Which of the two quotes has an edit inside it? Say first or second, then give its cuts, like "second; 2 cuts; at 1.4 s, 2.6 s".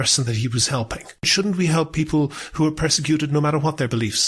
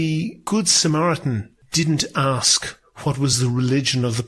first; 1 cut; at 1.3 s